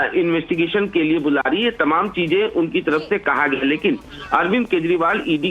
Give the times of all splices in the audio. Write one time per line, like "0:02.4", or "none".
0:04.1